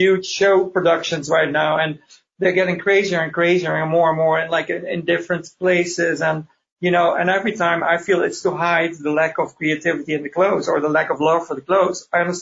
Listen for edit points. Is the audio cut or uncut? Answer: uncut